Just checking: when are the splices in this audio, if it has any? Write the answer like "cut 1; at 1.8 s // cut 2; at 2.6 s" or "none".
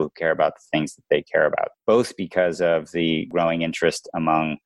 cut 1; at 1.7 s // cut 2; at 3.3 s